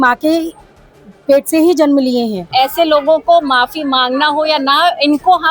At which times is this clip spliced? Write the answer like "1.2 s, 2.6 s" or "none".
2.5 s